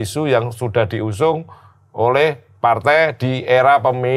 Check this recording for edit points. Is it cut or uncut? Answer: uncut